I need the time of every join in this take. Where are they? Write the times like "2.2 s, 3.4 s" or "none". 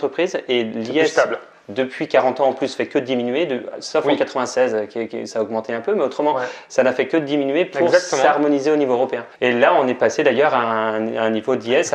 none